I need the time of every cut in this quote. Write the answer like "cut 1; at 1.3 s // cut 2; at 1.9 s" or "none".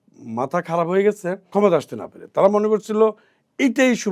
cut 1; at 1.4 s